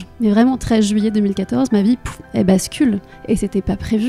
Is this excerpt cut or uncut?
uncut